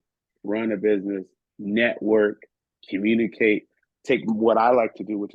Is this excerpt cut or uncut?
uncut